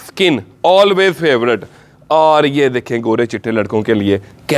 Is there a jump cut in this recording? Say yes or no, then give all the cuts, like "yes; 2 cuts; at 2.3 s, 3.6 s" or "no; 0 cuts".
no; 0 cuts